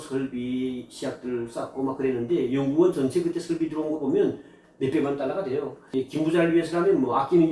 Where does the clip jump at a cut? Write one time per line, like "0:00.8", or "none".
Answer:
0:05.8